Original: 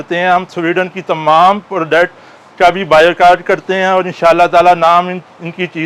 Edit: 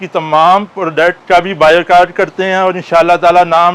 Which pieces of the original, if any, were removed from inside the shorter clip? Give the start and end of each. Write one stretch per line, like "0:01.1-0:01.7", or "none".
0:02.1-0:02.5